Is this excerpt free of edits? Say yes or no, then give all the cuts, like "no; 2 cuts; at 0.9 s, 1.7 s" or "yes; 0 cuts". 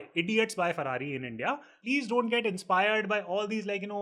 no; 1 cut; at 1.7 s